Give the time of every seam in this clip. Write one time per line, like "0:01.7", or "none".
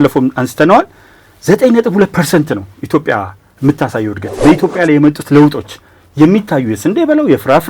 0:04.2